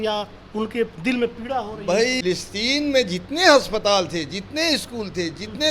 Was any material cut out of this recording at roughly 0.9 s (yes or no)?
no